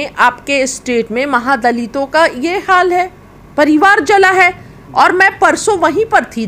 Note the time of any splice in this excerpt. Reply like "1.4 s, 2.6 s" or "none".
none